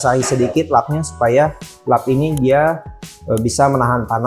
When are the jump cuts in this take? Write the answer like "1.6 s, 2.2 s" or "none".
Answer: none